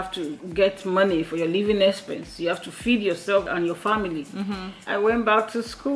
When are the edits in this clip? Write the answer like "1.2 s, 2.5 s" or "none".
3.5 s, 4.7 s